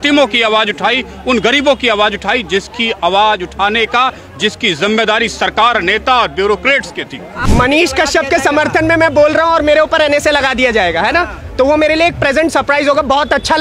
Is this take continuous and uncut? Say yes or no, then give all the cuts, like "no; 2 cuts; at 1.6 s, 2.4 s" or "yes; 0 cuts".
no; 1 cut; at 7.3 s